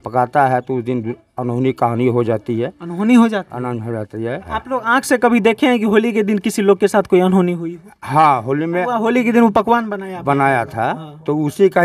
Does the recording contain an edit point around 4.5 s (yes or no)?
yes